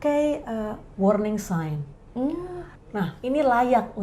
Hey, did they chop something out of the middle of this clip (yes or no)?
yes